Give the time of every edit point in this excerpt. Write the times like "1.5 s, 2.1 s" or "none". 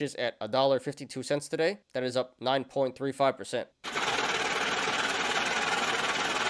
1.8 s